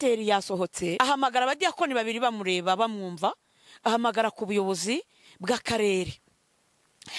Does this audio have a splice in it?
yes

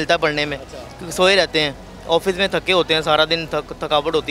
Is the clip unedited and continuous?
yes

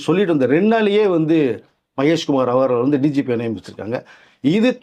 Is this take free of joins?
yes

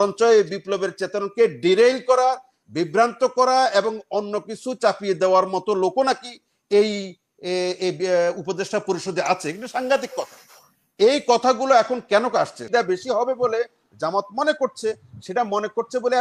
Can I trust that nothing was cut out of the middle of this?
no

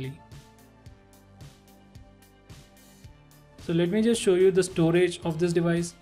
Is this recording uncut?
no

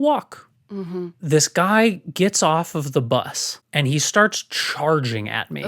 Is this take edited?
yes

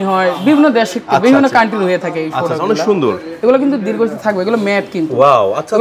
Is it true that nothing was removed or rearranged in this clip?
yes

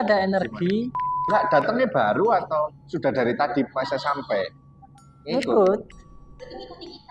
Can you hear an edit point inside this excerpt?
yes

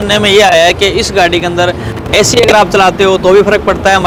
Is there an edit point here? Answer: no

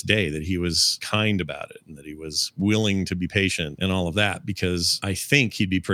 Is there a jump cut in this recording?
yes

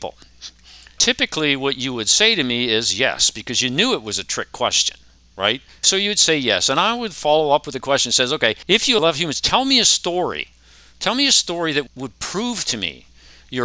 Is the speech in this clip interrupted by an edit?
yes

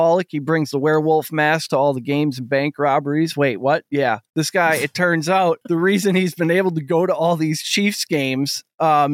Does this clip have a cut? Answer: yes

